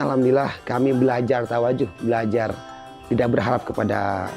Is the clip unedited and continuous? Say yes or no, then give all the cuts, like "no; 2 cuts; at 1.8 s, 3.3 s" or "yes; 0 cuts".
no; 1 cut; at 2.9 s